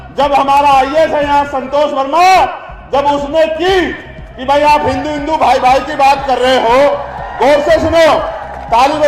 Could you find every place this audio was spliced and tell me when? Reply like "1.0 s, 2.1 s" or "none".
none